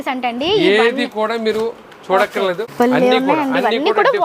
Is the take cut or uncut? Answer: cut